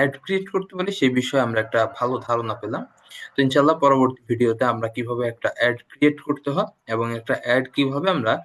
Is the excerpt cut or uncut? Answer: uncut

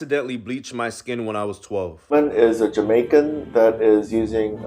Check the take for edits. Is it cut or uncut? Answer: cut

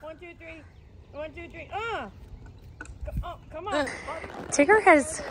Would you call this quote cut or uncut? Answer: cut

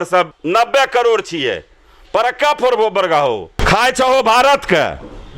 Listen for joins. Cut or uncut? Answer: cut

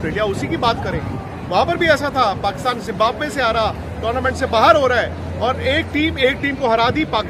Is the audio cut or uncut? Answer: uncut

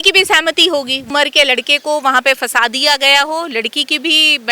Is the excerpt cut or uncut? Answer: cut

